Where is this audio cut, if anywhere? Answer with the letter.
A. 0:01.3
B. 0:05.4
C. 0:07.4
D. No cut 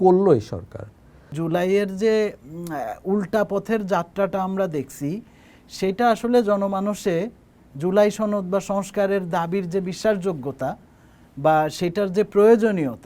A